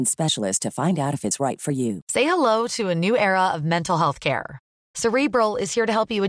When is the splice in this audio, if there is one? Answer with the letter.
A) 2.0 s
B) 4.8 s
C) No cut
A